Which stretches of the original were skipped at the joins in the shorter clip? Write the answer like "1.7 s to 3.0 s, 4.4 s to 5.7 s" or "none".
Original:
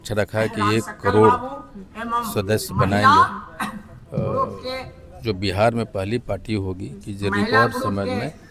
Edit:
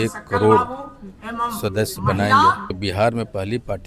3.5 s to 5.4 s